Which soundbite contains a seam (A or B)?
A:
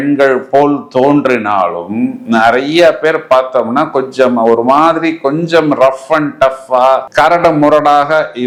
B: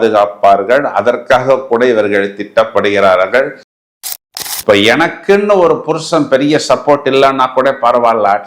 B